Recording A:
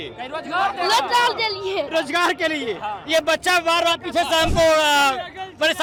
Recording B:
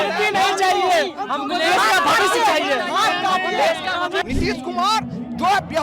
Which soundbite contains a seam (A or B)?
B